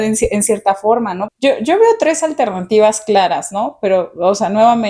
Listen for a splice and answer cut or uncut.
cut